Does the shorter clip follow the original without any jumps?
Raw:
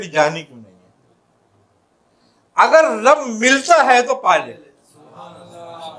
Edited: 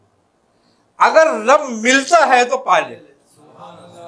yes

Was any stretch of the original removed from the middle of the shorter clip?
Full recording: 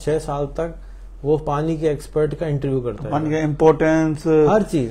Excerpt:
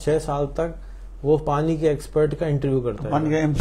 no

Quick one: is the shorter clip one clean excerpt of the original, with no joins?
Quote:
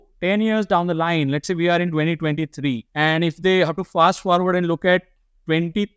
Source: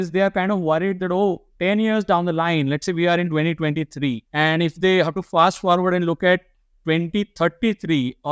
yes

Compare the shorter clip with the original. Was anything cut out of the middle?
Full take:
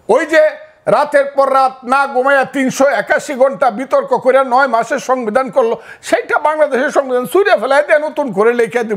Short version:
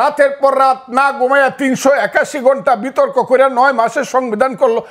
no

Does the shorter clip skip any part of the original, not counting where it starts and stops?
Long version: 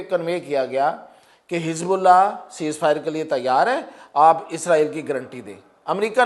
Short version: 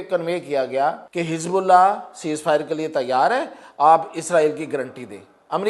yes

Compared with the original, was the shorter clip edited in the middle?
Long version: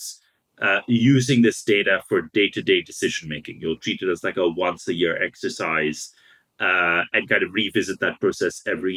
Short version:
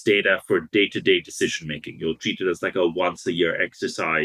no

